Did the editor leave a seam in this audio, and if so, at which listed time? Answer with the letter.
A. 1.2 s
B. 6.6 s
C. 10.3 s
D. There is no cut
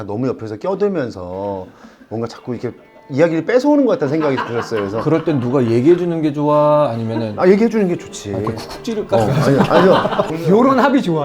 C